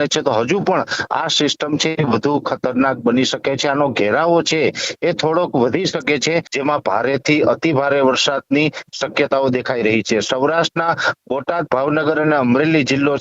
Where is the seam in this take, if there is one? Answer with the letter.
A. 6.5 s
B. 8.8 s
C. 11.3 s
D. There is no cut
A